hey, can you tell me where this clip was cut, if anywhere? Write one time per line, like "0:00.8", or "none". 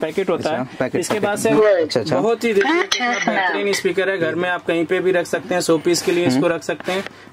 0:01.6